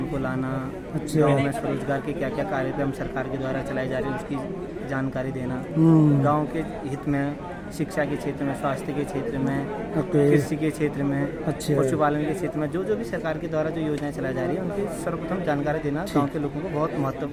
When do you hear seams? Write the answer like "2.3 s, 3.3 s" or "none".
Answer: none